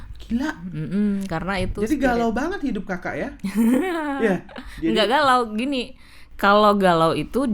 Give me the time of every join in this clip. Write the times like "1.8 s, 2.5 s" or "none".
none